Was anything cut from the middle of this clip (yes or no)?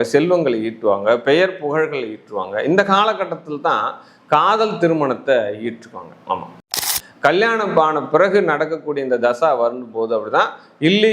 yes